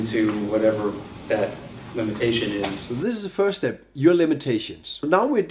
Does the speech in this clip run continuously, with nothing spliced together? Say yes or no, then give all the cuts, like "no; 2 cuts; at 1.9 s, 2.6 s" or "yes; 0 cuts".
yes; 0 cuts